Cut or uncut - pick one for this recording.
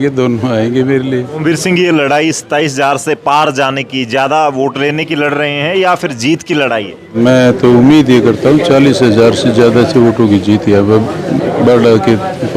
cut